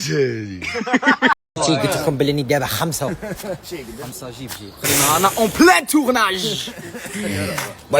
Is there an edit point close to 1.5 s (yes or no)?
yes